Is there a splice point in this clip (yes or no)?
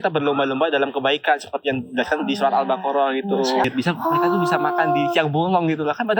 yes